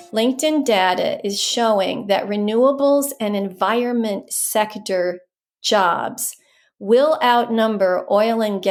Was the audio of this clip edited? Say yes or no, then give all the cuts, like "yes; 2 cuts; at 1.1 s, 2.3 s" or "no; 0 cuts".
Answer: no; 0 cuts